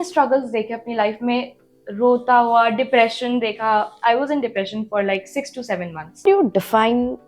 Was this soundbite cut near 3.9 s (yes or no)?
no